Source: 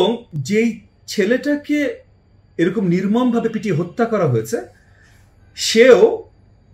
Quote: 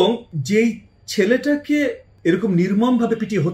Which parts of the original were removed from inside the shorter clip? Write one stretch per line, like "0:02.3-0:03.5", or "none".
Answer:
0:02.1-0:02.4